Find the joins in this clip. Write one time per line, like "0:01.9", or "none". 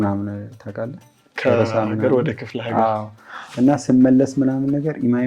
none

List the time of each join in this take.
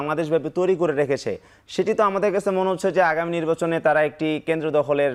none

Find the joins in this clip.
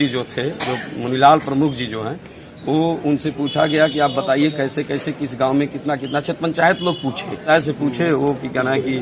0:07.4

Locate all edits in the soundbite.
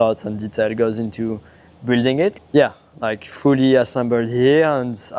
0:02.3

